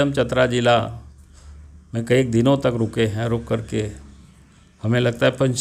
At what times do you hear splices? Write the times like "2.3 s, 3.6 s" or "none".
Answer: none